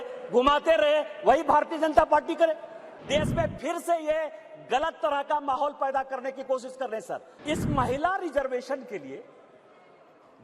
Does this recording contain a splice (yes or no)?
yes